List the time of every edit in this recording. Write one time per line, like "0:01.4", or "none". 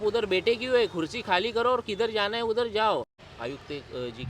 0:03.1